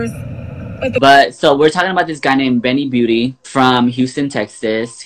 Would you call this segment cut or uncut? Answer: cut